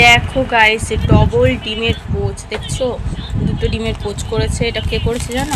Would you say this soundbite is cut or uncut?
uncut